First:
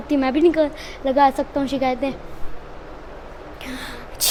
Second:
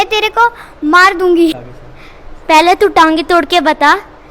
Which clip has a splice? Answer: second; 1 cut; at 1.7 s

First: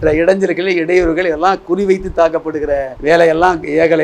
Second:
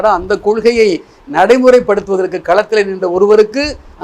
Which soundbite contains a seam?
first; 1 cut; at 2.9 s

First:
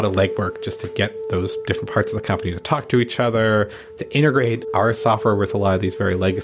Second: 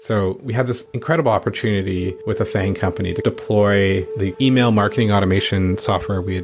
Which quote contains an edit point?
second; 2 cuts; at 0.9 s, 2.2 s

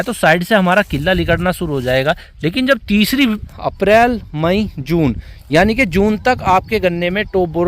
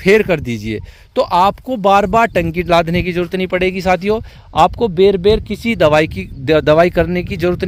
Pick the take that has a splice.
first; 1 cut; at 3.5 s

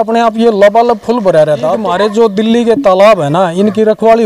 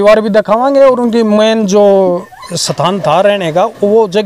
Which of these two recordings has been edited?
first; 1 cut; at 1.8 s

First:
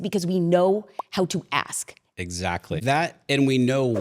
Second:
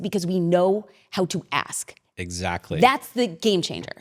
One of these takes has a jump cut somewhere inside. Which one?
first; 1 cut; at 2.8 s

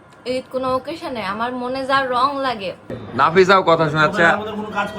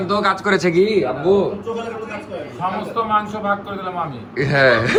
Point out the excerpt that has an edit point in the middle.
first; 1 cut; at 3.0 s

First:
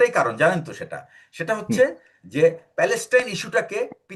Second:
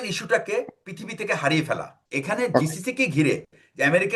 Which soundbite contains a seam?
second; 1 cut; at 2.0 s

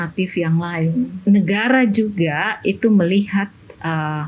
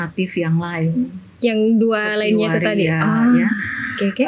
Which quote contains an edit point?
first; 1 cut; at 1.2 s

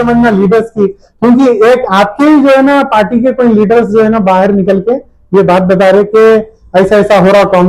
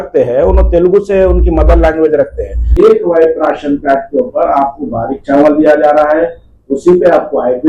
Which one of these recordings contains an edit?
second; 1 cut; at 2.8 s

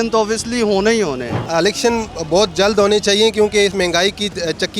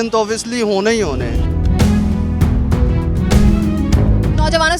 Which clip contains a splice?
first; 2 cuts; at 1.4 s, 3.7 s

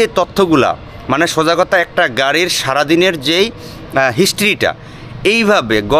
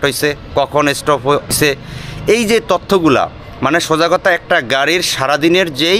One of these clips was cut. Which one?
second; 1 cut; at 1.5 s

